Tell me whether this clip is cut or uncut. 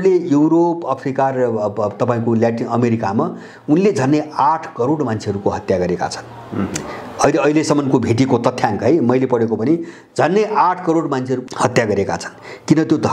uncut